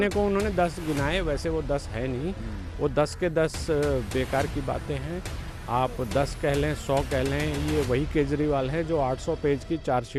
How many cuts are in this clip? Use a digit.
0